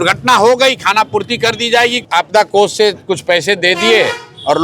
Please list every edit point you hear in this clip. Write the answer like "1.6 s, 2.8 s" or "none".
2.0 s